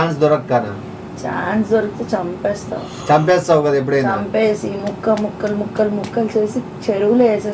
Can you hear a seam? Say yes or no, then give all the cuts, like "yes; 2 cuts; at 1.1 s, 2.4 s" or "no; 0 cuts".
no; 0 cuts